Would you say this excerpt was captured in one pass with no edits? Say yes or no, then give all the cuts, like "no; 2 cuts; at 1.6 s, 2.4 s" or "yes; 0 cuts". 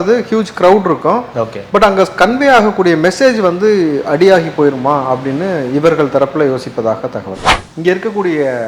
no; 1 cut; at 7.5 s